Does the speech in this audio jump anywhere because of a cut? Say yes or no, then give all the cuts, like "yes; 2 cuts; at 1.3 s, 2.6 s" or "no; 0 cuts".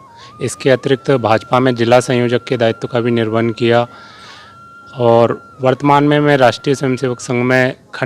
no; 0 cuts